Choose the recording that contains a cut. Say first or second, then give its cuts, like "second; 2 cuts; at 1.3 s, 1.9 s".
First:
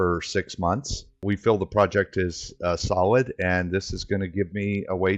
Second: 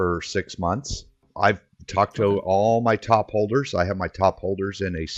second; 1 cut; at 1.0 s